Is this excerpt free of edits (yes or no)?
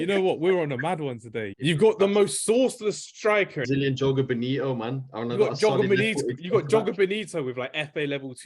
no